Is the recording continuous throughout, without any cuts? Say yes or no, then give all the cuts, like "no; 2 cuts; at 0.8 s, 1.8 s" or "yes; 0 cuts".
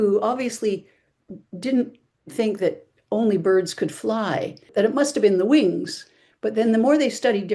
no; 1 cut; at 4.7 s